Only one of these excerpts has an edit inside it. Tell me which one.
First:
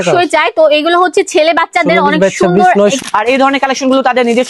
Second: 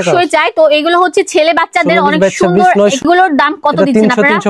first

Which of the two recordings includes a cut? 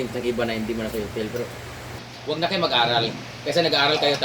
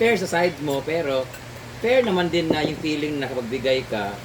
first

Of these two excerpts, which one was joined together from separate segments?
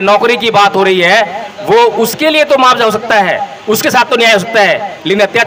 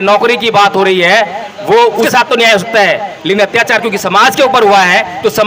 second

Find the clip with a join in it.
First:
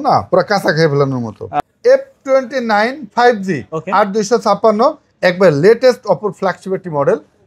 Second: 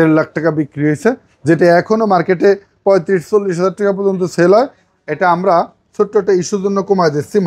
first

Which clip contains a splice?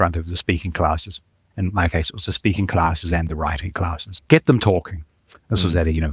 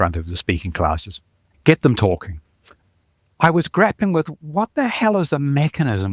second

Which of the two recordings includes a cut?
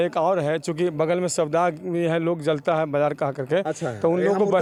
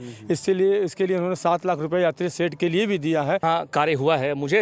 second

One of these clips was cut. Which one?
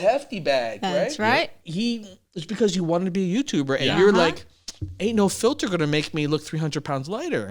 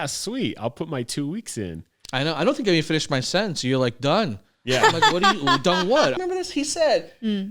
second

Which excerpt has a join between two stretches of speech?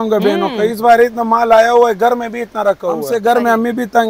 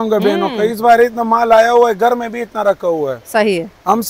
first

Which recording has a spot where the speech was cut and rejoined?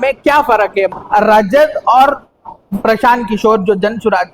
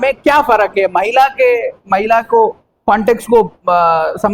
first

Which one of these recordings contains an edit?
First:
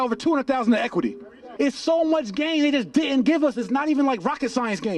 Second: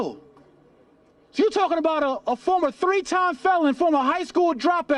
first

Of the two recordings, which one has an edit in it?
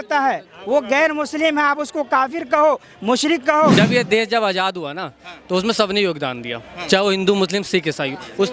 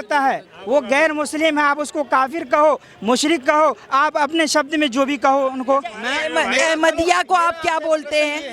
first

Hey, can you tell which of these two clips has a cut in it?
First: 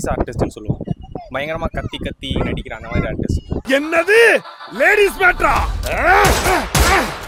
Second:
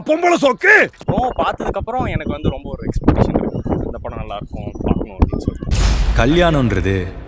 second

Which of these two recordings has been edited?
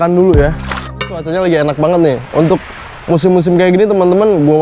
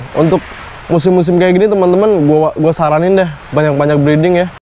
first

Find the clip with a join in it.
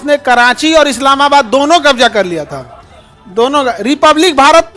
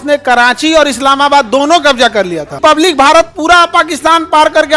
second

